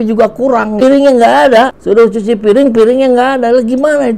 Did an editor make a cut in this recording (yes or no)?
yes